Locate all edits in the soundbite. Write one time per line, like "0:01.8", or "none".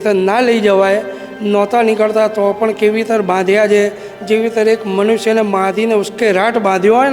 none